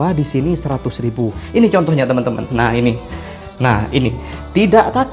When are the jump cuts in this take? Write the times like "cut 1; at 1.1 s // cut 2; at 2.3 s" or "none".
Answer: cut 1; at 1.4 s